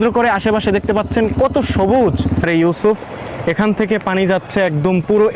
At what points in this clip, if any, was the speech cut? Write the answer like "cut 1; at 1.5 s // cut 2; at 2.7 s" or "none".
cut 1; at 2.4 s